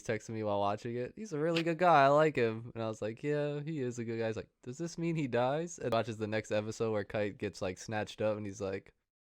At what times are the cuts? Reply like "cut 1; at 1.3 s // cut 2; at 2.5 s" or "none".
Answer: cut 1; at 5.9 s